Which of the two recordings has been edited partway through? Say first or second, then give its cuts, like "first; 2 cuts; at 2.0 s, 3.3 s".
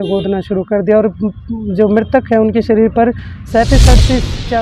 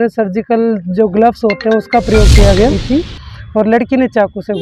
second; 1 cut; at 2.5 s